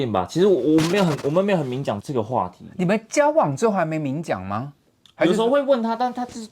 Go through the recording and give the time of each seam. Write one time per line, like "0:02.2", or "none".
none